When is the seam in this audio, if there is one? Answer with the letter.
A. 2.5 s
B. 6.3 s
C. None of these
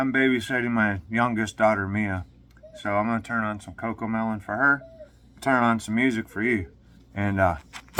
C